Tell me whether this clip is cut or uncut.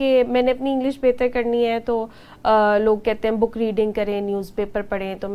uncut